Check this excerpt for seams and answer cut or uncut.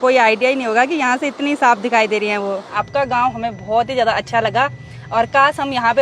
cut